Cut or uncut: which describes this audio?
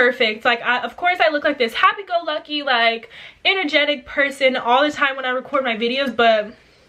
uncut